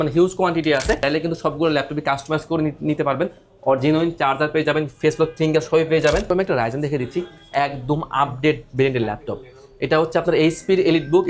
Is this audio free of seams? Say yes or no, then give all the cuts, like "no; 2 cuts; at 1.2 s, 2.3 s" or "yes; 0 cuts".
no; 2 cuts; at 1.0 s, 6.3 s